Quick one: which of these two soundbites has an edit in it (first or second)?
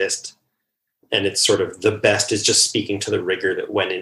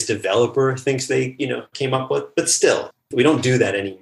second